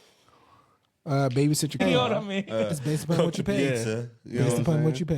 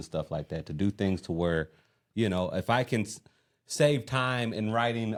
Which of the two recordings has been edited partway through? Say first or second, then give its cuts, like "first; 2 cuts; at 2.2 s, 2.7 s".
first; 1 cut; at 1.8 s